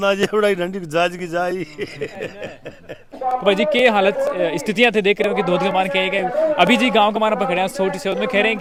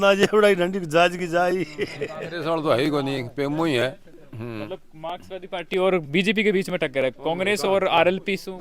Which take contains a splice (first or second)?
second